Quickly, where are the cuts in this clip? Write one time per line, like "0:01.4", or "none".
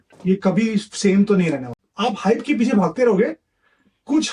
0:01.8

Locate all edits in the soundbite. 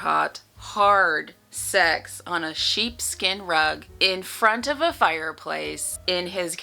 none

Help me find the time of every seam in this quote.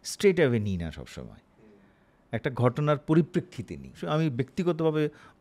0:04.0

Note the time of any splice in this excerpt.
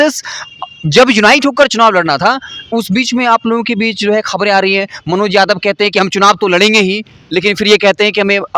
none

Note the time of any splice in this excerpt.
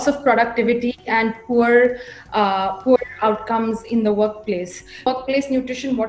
0:05.1

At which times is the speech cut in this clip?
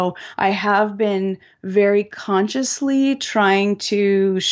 none

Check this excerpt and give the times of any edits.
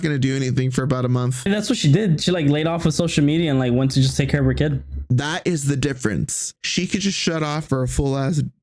0:01.4
0:06.5

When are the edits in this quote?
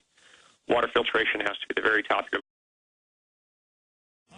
none

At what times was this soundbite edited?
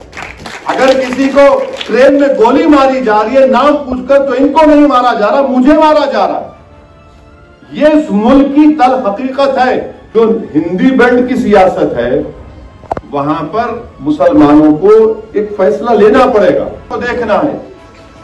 0:10.0
0:16.9

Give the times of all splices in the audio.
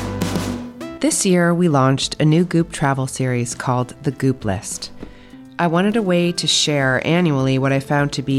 0:00.9

